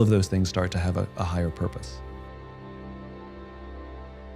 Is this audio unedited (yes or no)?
no